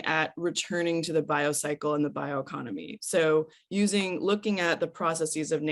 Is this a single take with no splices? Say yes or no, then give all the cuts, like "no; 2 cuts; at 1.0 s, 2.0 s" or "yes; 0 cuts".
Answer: yes; 0 cuts